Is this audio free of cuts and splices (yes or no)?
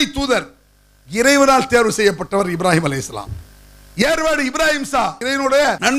yes